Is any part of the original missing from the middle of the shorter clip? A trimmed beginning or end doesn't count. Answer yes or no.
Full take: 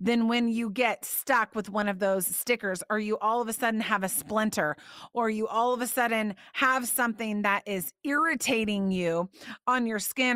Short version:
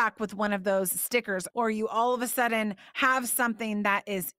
yes